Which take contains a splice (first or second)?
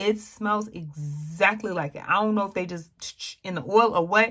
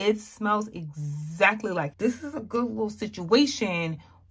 second